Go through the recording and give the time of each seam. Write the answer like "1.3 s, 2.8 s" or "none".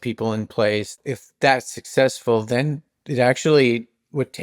0.9 s